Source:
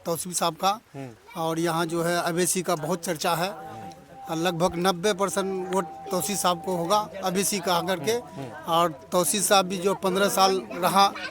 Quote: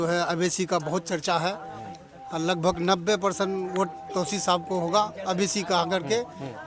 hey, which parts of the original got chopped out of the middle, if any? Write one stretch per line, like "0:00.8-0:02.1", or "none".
none